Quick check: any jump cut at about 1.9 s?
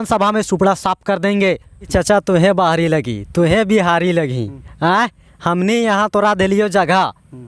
yes; 1 cut; at 1.9 s

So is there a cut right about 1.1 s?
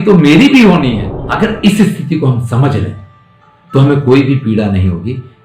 yes; 1 cut; at 1.1 s

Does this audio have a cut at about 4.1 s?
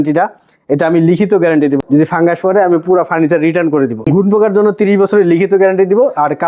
yes; 2 cuts; at 1.8 s, 4.1 s

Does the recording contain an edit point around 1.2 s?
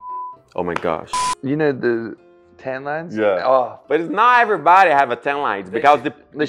yes; 1 cut; at 1.2 s

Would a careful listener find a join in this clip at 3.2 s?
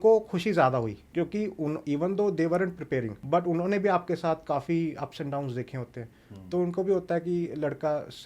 yes; 2 cuts; at 1.0 s, 3.2 s

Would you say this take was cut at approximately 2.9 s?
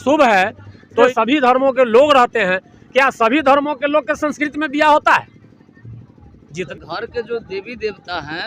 no; 2 cuts; at 1.0 s, 6.7 s

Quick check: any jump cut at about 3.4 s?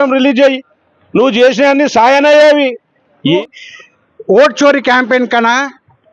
yes; 1 cut; at 3.4 s

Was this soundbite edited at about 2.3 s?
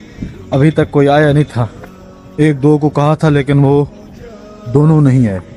no; 0 cuts

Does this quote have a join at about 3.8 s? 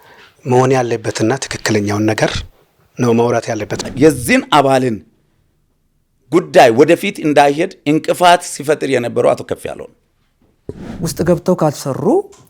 yes; 2 cuts; at 3.8 s, 10.8 s

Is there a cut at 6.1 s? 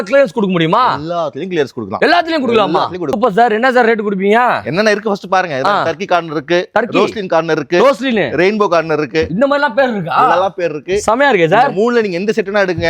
no; 1 cut; at 3.2 s

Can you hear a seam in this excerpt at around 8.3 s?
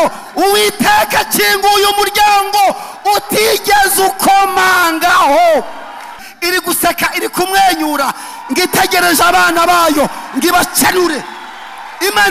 no; 1 cut; at 6.1 s

